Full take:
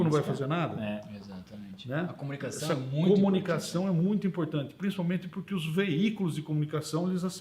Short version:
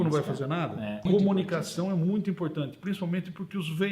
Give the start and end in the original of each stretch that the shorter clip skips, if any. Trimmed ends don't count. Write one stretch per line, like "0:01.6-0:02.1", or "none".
0:01.0-0:03.0